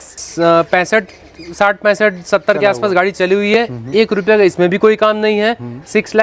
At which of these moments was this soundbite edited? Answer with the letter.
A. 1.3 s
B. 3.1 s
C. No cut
C